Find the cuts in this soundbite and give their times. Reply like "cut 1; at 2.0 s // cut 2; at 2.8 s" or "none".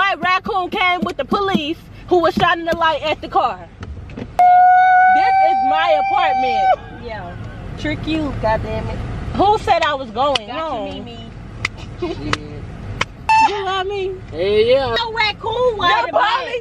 none